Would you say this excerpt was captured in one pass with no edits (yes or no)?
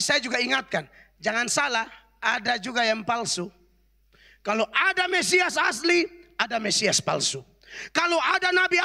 yes